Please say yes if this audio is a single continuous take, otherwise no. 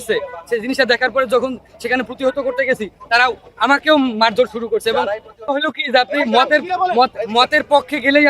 yes